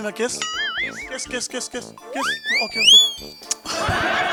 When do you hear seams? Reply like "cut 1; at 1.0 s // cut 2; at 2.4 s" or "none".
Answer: none